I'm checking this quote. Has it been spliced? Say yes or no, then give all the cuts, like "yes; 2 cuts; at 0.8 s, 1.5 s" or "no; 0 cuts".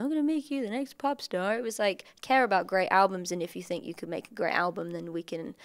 no; 0 cuts